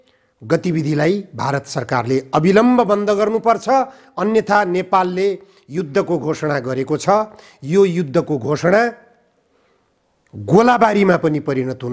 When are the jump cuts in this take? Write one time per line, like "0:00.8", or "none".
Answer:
none